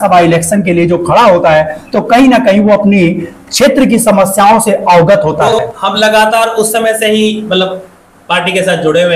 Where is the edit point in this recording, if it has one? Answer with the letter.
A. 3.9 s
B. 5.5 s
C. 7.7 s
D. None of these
B